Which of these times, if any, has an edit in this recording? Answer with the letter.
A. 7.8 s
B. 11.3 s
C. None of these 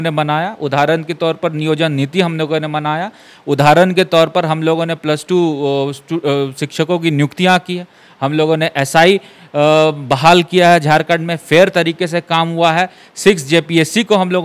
C